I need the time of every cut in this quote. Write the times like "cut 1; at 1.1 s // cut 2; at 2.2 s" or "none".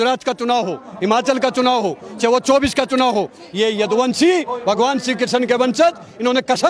none